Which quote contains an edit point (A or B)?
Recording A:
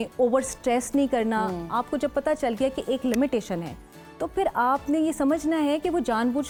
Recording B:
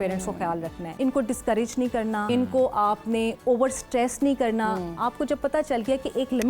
B